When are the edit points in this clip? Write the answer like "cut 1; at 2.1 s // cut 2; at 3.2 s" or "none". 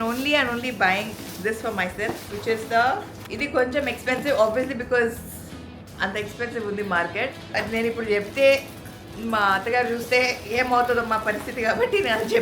cut 1; at 3.2 s // cut 2; at 7.5 s